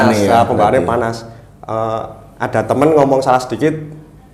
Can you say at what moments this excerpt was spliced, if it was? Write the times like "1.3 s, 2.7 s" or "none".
none